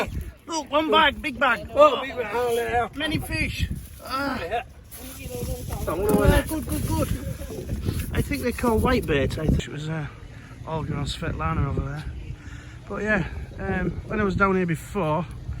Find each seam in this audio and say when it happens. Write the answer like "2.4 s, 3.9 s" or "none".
9.6 s